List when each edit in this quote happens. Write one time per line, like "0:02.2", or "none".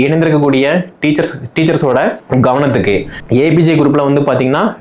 0:02.2
0:03.1